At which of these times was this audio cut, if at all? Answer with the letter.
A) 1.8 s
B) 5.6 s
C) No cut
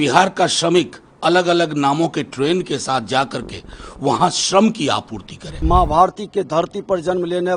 B